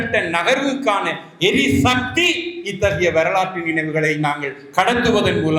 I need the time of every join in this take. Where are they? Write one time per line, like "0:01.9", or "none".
none